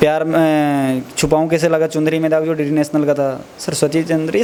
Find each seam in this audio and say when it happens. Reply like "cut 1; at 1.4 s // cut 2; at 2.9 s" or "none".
none